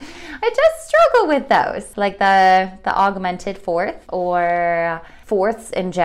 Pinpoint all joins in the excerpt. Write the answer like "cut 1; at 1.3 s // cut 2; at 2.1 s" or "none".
cut 1; at 1.8 s // cut 2; at 4.0 s // cut 3; at 5.1 s

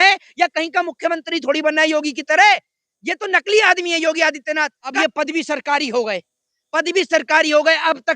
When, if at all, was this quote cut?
cut 1; at 4.9 s

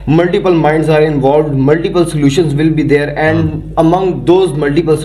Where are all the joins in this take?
none

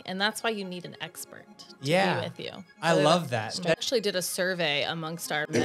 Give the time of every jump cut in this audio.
cut 1; at 3.8 s

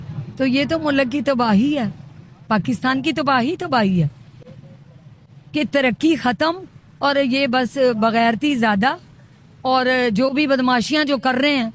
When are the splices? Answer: none

